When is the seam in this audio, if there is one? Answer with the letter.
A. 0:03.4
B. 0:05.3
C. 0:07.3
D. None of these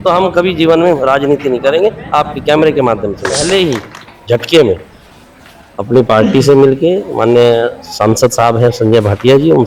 A